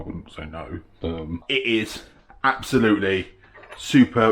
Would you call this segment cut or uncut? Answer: cut